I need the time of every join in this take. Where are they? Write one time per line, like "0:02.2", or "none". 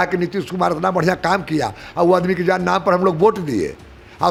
none